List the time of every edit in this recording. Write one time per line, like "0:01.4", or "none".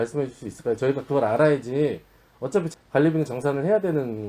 0:02.7